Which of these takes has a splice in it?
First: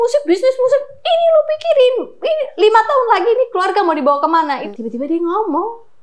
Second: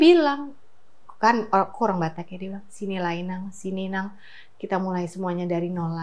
first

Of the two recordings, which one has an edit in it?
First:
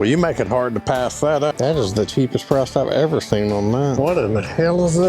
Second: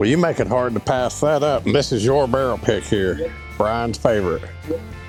first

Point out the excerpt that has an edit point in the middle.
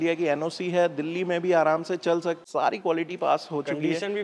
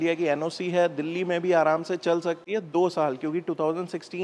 first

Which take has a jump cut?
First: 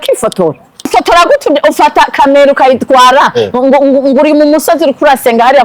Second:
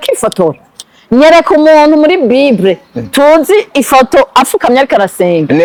first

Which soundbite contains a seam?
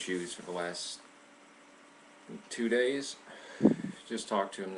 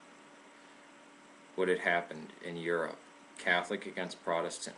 second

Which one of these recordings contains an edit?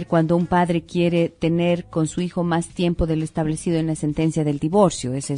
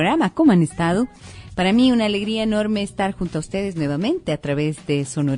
first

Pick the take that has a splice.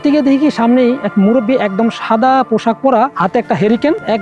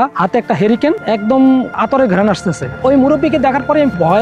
second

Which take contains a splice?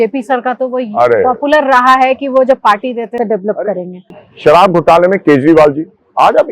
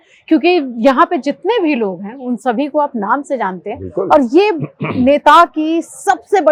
first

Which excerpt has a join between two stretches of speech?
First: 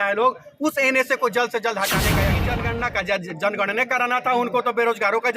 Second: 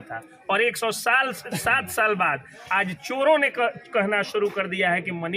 first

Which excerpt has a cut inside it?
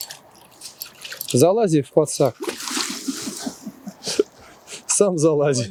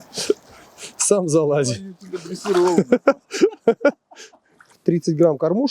second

